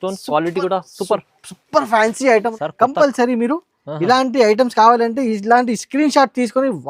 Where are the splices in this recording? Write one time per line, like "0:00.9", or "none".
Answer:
0:02.6